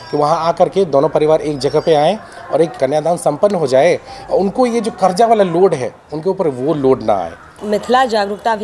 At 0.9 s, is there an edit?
no; 2 cuts; at 2.7 s, 7.5 s

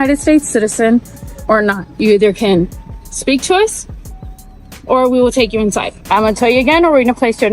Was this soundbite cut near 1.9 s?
yes; 2 cuts; at 1.9 s, 6.0 s

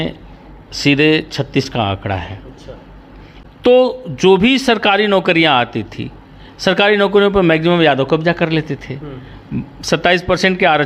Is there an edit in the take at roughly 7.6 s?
no; 1 cut; at 3.3 s

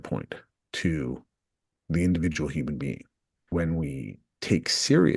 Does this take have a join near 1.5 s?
no; 1 cut; at 3.5 s

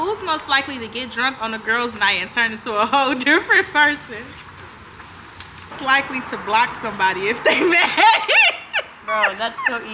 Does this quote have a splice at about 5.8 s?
yes; 1 cut; at 5.8 s

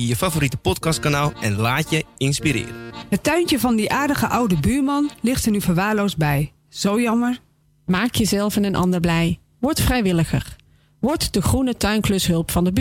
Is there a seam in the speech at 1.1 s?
no; 1 cut; at 2.9 s

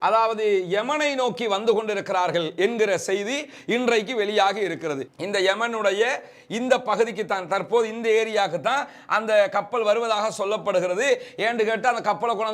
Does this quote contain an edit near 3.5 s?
no; 1 cut; at 5.1 s

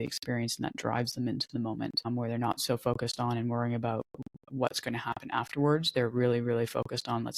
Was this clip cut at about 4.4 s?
no; 1 cut; at 2.1 s

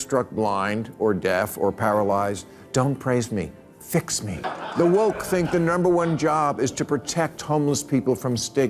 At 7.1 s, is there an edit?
no; 1 cut; at 4.4 s

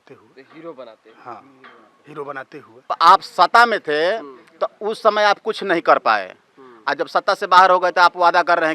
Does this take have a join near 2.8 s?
yes; 1 cut; at 2.8 s

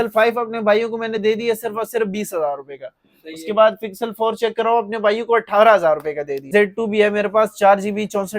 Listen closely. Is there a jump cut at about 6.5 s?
yes; 1 cut; at 6.5 s

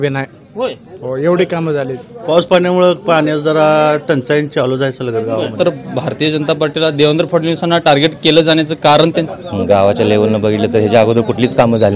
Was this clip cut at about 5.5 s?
yes; 3 cuts; at 2.2 s, 5.5 s, 9.3 s

